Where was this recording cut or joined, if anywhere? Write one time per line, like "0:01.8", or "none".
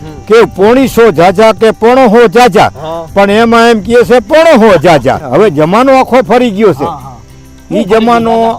0:05.2